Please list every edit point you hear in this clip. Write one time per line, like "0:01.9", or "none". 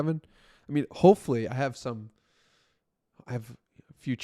none